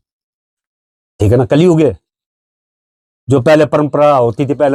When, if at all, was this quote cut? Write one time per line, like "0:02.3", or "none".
none